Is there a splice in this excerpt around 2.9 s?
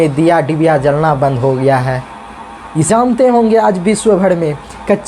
yes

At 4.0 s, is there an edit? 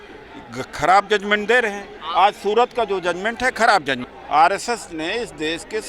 yes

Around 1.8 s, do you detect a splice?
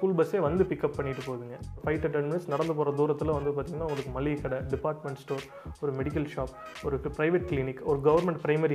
yes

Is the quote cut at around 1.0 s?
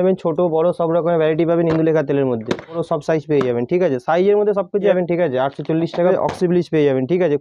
no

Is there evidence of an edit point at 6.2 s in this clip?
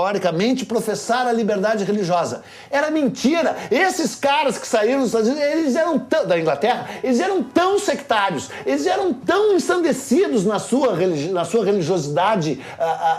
no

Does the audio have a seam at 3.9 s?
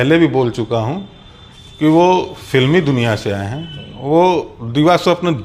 no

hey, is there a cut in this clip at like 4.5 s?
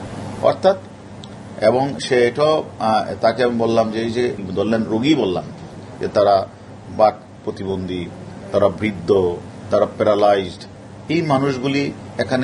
yes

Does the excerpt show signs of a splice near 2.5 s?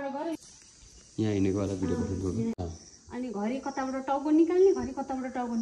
yes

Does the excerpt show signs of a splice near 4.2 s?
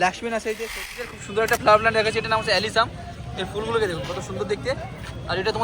no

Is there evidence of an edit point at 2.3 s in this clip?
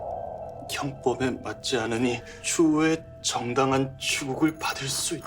yes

